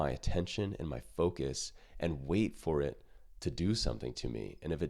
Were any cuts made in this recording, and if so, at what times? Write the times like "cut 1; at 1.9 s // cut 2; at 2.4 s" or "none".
none